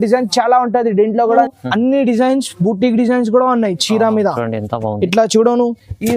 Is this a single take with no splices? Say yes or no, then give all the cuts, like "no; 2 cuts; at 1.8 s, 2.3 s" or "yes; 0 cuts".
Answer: no; 1 cut; at 1.5 s